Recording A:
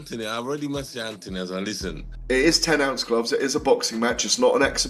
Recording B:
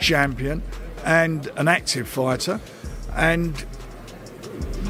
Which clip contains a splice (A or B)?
A